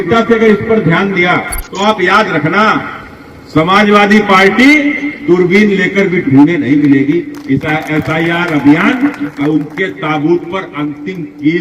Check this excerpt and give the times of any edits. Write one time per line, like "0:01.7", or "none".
0:01.6